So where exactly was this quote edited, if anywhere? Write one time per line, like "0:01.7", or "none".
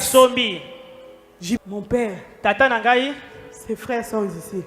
0:01.6